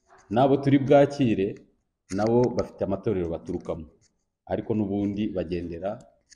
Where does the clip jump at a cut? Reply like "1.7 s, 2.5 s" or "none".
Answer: none